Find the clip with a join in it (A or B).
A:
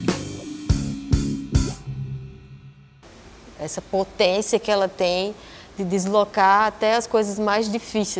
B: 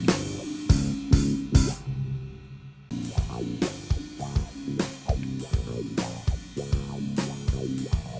A